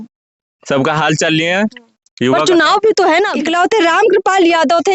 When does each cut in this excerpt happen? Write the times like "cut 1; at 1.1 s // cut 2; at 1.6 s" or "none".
cut 1; at 3.3 s